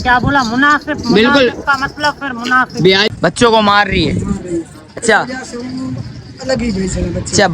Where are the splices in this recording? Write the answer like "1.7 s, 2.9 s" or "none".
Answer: 3.1 s